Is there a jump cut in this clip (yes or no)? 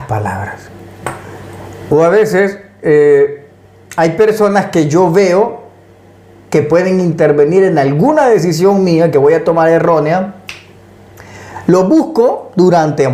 no